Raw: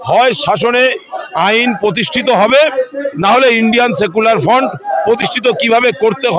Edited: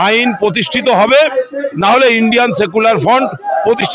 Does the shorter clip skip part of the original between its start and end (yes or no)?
no